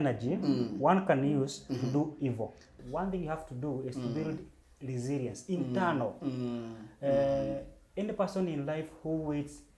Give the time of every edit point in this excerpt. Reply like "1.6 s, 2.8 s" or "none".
2.8 s